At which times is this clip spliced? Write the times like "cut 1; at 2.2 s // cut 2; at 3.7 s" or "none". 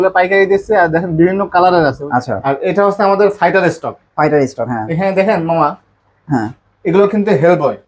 cut 1; at 2.0 s